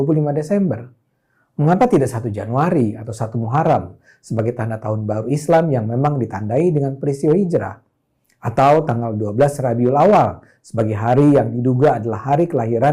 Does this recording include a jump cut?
no; 0 cuts

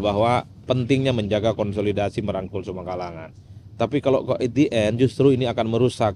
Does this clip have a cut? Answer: no; 0 cuts

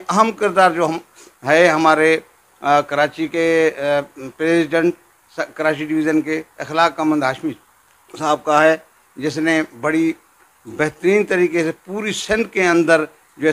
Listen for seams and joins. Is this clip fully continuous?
yes; 0 cuts

